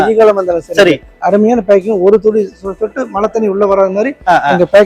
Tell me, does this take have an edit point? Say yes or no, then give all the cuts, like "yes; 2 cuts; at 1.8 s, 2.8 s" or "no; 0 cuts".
yes; 1 cut; at 1.0 s